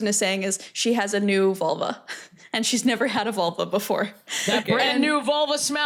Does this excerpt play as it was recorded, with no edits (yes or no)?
yes